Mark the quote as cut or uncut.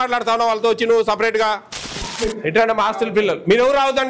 cut